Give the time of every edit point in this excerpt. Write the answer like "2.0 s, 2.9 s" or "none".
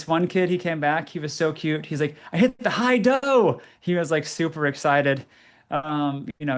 none